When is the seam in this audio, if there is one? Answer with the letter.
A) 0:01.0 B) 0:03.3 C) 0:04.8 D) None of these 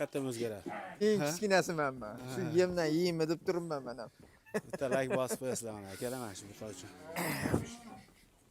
A